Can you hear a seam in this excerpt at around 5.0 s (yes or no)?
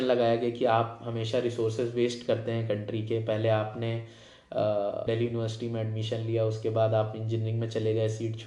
yes